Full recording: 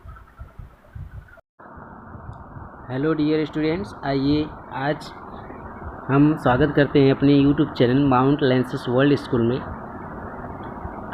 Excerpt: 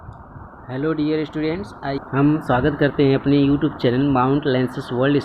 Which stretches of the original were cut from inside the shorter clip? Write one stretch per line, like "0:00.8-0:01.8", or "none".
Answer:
0:04.2-0:05.9